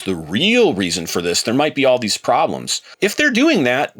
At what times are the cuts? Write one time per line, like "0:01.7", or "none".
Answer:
0:02.9